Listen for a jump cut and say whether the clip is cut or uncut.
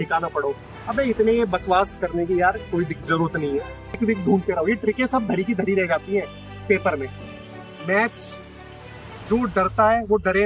cut